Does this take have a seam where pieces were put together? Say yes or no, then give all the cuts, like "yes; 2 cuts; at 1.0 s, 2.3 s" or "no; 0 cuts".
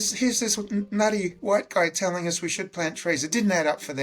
no; 0 cuts